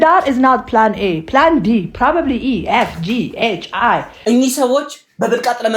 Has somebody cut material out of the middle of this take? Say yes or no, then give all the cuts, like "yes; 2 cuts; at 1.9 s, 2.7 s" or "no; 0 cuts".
yes; 1 cut; at 4.1 s